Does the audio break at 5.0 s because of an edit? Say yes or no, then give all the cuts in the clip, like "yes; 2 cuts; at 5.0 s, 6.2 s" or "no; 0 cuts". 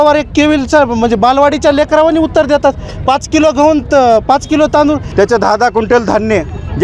yes; 1 cut; at 5.0 s